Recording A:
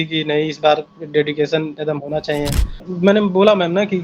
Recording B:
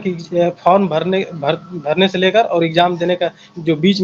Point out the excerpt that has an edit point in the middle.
A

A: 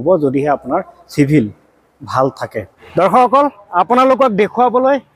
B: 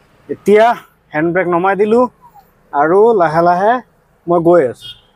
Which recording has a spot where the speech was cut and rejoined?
A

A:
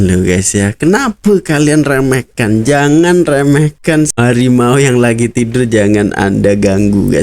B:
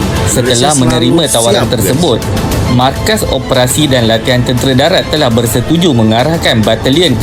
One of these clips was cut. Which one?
A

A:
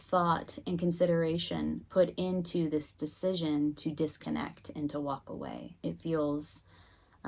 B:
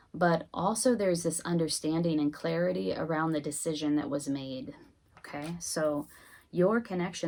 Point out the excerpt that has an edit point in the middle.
A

